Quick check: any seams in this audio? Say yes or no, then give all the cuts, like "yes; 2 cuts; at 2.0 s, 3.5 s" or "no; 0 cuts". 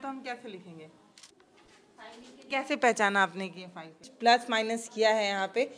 yes; 3 cuts; at 1.3 s, 2.5 s, 4.1 s